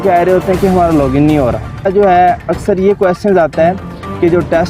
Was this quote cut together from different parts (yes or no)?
yes